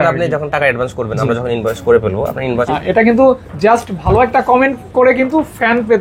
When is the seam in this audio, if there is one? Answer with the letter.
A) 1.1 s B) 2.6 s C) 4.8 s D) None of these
B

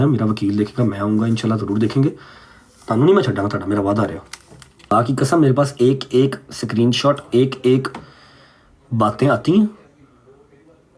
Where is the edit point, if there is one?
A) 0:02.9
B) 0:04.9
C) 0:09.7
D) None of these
B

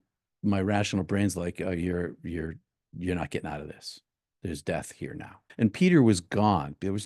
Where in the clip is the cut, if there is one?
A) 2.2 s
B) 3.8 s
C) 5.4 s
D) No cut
C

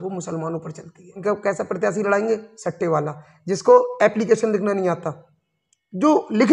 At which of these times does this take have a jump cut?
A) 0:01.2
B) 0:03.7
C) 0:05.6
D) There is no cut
A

